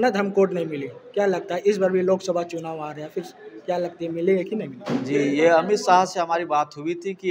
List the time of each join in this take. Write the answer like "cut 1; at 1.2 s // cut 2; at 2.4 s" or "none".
none